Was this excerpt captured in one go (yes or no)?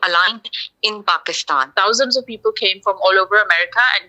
no